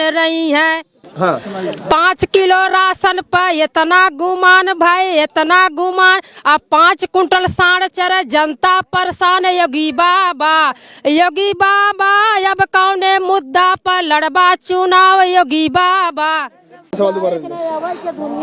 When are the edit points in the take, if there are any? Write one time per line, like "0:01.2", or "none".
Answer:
none